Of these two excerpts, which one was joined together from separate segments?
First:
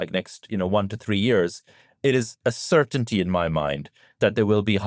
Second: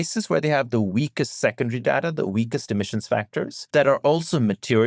second; 1 cut; at 3.6 s

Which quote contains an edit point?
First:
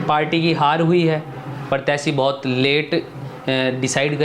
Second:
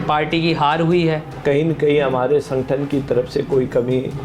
second; 1 cut; at 1.3 s

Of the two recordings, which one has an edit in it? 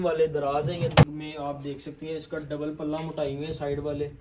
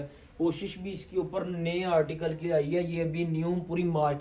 first; 1 cut; at 1.0 s

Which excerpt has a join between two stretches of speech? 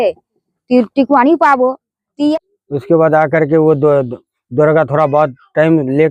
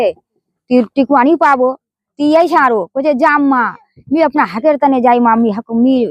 first; 1 cut; at 2.3 s

